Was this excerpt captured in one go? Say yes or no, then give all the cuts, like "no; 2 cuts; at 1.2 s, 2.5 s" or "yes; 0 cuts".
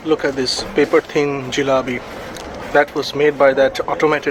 yes; 0 cuts